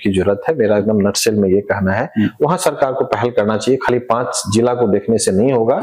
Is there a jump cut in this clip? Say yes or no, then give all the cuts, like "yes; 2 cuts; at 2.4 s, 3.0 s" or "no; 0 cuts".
no; 0 cuts